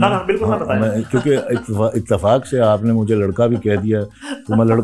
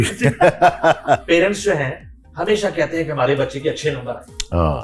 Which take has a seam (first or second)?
second